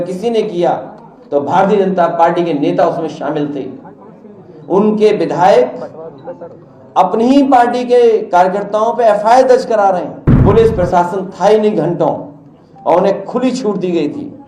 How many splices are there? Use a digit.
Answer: 1